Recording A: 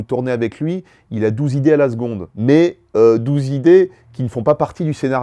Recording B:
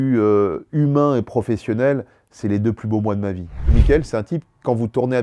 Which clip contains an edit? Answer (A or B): B